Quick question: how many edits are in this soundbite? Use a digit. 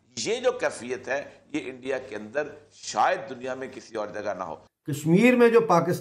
1